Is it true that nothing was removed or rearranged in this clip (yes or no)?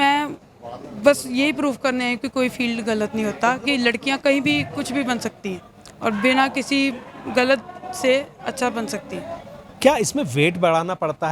yes